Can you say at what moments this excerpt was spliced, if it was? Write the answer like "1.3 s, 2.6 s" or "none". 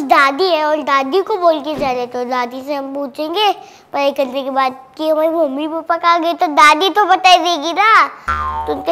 none

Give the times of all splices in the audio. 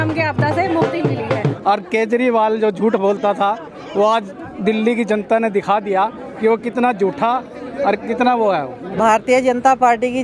1.5 s, 9.0 s

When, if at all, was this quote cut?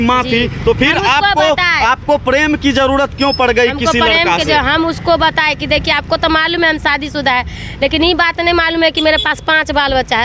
none

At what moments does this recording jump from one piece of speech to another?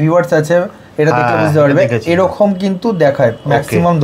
none

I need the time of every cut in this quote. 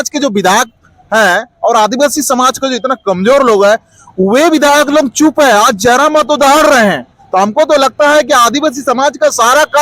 none

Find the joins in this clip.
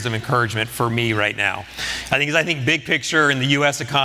none

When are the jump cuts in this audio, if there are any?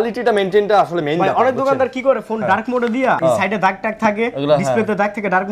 3.2 s

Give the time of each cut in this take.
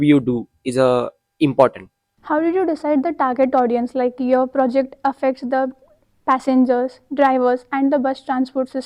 none

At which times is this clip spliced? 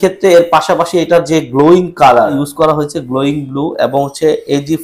2.3 s

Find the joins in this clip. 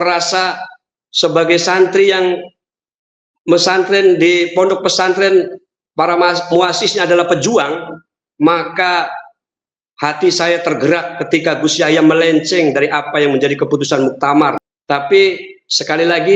14.7 s

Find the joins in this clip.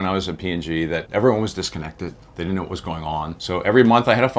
1.0 s, 2.2 s, 3.4 s

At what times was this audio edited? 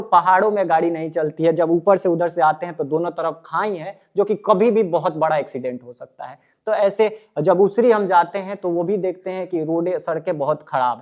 none

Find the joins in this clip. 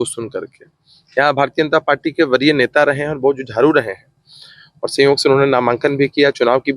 none

